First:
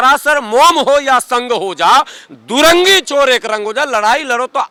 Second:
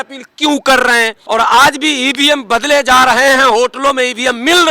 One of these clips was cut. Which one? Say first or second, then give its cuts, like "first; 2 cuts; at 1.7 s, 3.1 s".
second; 1 cut; at 1.2 s